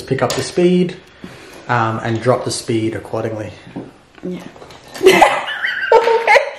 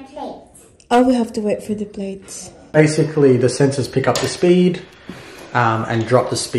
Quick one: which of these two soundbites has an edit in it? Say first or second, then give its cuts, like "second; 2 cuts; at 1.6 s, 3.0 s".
second; 1 cut; at 2.8 s